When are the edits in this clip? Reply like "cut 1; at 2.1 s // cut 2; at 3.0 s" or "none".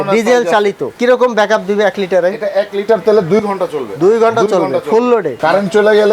cut 1; at 0.9 s // cut 2; at 5.3 s